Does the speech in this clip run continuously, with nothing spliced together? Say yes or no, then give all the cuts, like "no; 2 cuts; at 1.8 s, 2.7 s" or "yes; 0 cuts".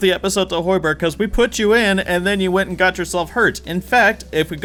yes; 0 cuts